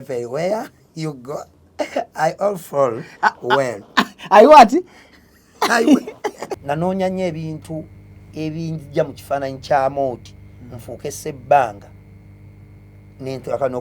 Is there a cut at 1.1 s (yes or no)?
no